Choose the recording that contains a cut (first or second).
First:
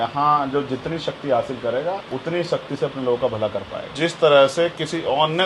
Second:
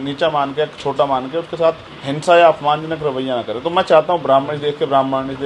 first